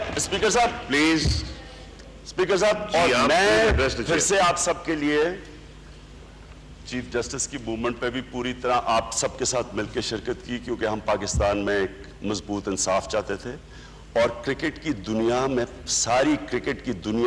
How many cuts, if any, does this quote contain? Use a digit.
0